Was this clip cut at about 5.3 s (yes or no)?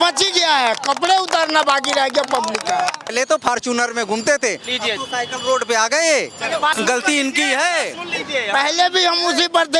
no